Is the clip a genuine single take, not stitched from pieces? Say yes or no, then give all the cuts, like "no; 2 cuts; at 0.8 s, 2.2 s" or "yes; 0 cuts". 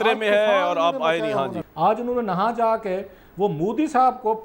no; 1 cut; at 1.6 s